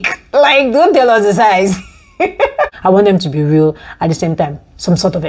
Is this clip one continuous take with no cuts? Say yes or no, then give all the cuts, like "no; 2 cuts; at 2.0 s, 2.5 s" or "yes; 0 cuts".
no; 1 cut; at 2.7 s